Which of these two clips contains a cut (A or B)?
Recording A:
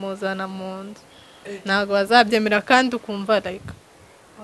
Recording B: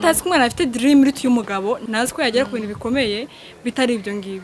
B